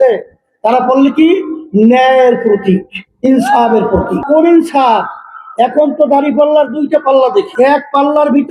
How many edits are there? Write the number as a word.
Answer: two